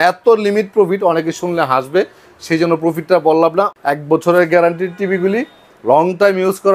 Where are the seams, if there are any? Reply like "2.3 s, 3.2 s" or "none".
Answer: 3.7 s